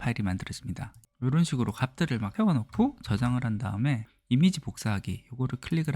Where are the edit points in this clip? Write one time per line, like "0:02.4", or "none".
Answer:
0:01.0
0:02.3
0:04.1